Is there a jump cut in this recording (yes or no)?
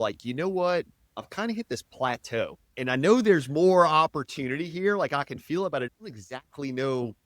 yes